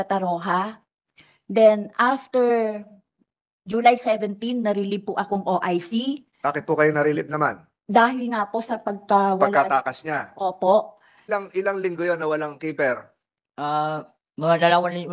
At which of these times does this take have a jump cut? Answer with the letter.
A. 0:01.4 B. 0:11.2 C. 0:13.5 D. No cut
B